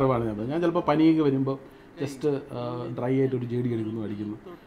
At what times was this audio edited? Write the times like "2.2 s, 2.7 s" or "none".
none